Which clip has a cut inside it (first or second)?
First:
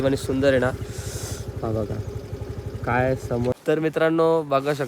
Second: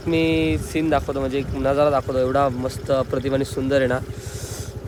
first